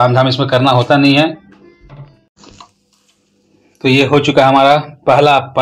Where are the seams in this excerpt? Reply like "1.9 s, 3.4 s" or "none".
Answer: 2.3 s